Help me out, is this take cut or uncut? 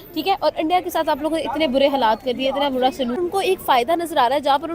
cut